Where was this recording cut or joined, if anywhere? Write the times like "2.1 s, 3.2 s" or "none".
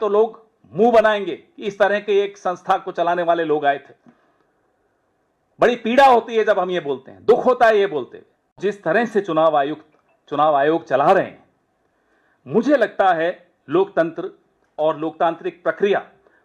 8.5 s